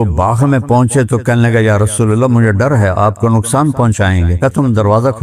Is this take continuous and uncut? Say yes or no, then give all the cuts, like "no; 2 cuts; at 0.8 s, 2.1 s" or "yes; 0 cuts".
no; 1 cut; at 4.3 s